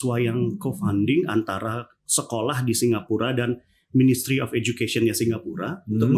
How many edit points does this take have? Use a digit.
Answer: 0